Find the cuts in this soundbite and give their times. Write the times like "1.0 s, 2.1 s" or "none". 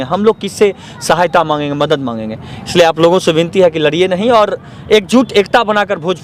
none